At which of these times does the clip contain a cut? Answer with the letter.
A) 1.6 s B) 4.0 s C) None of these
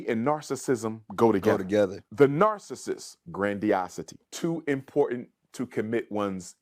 C